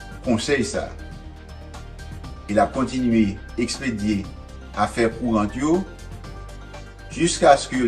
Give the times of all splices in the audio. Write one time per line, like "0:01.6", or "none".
0:01.0
0:02.5